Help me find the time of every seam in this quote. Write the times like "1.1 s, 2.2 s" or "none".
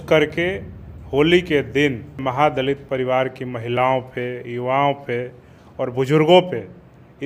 2.2 s